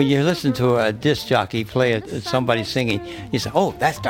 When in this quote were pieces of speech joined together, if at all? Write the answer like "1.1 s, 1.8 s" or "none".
2.1 s